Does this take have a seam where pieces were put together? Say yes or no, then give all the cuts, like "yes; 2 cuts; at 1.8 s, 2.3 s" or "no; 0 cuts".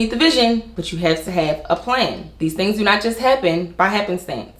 no; 0 cuts